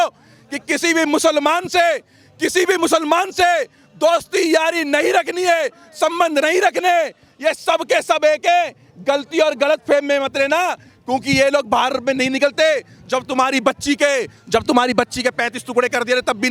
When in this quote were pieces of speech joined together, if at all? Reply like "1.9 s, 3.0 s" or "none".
none